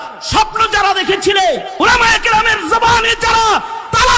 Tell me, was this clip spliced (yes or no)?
yes